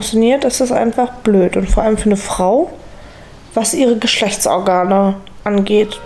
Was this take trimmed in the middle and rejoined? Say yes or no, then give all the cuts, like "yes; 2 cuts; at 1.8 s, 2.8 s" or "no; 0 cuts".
no; 0 cuts